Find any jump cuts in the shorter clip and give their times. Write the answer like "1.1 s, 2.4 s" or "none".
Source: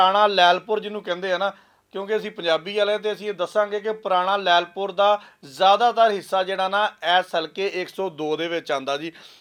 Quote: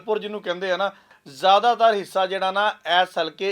1.2 s